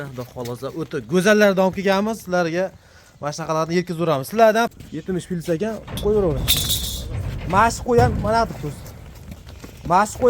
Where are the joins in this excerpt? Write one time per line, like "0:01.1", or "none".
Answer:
0:04.7